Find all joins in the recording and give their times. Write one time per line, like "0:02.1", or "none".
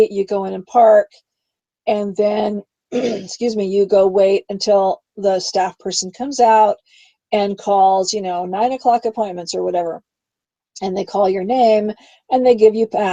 none